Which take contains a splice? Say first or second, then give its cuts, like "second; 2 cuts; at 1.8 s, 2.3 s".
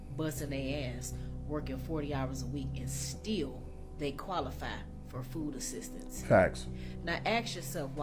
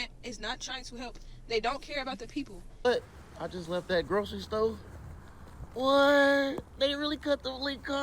second; 1 cut; at 2.8 s